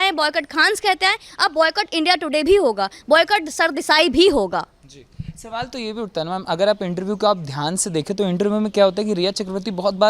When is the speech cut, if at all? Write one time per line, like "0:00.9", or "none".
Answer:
none

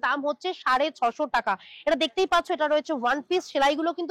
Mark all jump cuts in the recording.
none

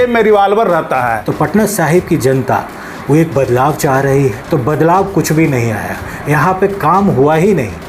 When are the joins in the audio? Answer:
0:01.2
0:04.4

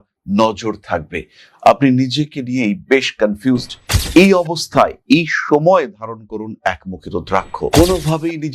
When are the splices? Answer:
none

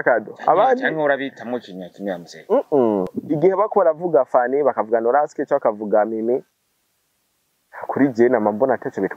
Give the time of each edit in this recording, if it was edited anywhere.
0:03.2

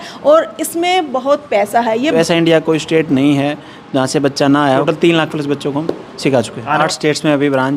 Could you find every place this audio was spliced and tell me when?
0:02.2
0:04.8
0:06.8

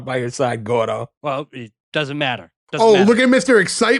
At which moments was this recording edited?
0:01.1

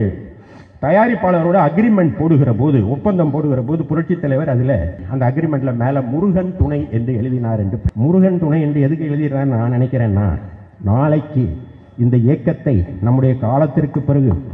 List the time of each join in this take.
0:05.0
0:07.9

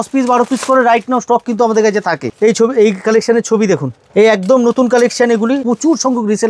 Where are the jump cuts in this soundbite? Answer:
0:02.3
0:04.0
0:05.6

